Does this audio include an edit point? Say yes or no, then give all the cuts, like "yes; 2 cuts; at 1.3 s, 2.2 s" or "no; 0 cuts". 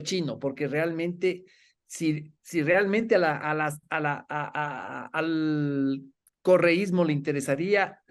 no; 0 cuts